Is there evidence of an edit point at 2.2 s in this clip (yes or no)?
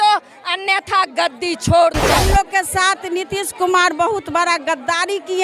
yes